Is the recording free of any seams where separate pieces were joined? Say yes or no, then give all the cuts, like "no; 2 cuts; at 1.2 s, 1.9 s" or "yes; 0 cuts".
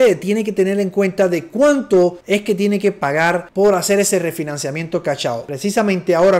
yes; 0 cuts